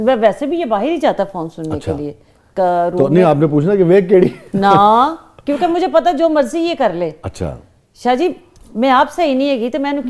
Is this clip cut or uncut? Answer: uncut